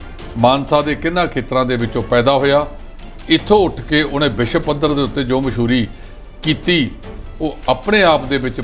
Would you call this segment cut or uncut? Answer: uncut